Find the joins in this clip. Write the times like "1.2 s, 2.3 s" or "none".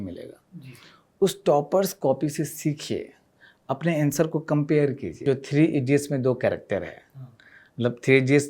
5.1 s